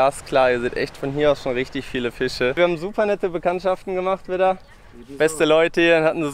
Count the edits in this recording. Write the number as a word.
one